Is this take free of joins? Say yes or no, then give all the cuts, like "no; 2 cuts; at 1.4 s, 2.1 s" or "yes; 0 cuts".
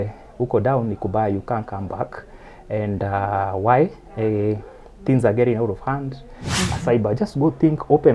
no; 1 cut; at 6.5 s